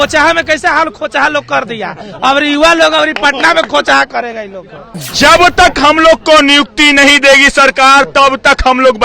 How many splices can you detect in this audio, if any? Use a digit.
1